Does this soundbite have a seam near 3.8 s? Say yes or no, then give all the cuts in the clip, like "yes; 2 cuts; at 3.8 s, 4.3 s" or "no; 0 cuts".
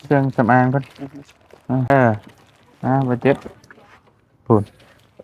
no; 1 cut; at 1.9 s